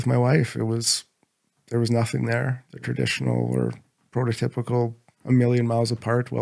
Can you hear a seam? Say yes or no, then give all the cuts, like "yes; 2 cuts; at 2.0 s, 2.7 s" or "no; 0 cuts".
yes; 1 cut; at 2.7 s